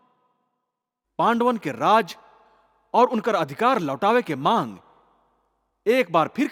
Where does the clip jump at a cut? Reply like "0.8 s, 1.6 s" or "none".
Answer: none